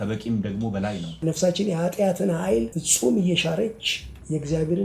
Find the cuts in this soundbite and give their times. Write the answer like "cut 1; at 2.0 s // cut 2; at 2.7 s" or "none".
cut 1; at 1.2 s // cut 2; at 2.8 s